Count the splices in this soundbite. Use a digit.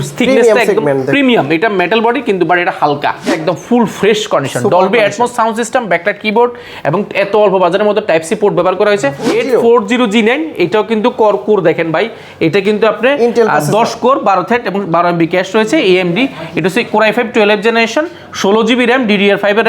2